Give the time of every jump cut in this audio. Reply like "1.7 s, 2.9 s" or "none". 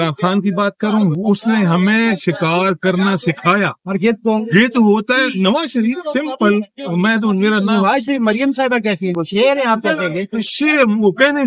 none